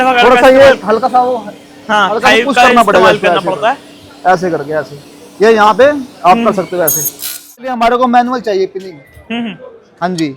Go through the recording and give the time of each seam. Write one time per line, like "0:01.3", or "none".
0:07.7